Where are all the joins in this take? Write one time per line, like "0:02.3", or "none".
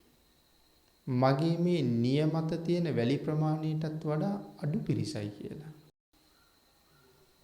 0:06.1